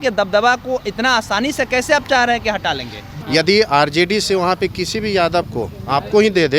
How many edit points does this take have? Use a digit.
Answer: 1